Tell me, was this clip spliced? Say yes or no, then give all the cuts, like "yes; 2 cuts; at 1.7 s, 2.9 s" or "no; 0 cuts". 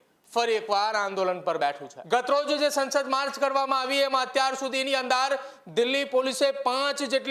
yes; 1 cut; at 1.9 s